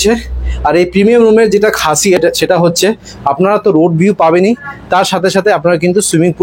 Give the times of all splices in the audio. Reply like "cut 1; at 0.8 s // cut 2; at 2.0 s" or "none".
cut 1; at 2.2 s